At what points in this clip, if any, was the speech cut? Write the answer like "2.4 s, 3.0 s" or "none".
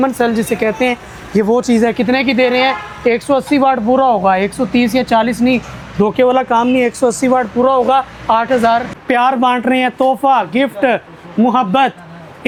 none